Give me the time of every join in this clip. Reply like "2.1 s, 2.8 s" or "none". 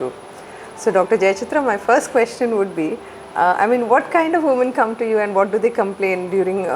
none